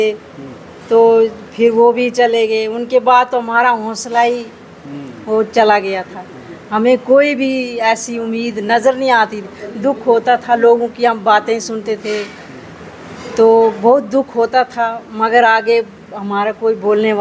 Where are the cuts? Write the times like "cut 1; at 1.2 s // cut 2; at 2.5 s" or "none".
none

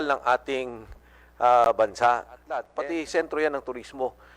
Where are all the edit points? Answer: cut 1; at 2.7 s

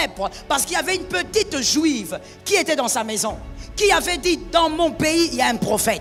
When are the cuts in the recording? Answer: none

